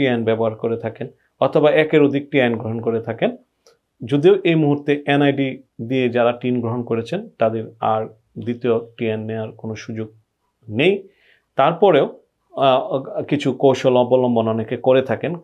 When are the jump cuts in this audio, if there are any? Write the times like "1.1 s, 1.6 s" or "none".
none